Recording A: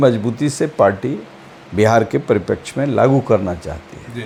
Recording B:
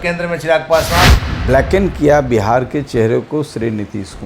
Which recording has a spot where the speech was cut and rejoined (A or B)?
B